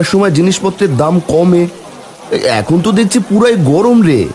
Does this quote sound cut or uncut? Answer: uncut